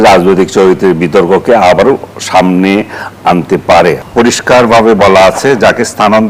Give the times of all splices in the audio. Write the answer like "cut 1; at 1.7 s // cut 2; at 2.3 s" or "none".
cut 1; at 4.0 s

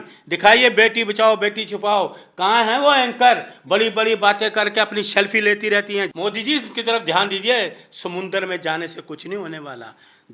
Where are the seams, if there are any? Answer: cut 1; at 6.1 s

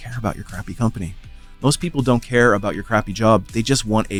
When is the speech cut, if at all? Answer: none

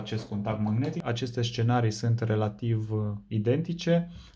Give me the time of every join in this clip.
cut 1; at 1.0 s

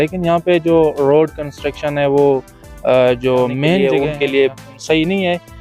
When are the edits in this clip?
cut 1; at 3.8 s

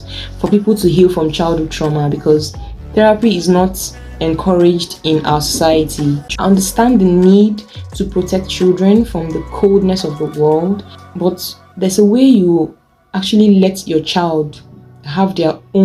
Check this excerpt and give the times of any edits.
cut 1; at 6.3 s

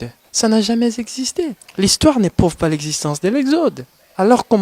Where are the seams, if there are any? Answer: cut 1; at 1.6 s

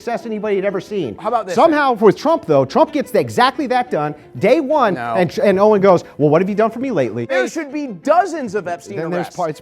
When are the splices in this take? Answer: cut 1; at 7.2 s

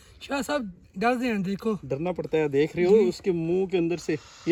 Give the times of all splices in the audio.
none

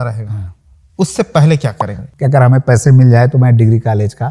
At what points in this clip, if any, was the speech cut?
cut 1; at 2.0 s

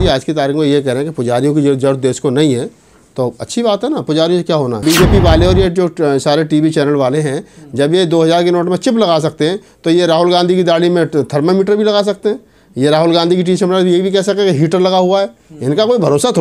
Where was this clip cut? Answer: cut 1; at 4.8 s

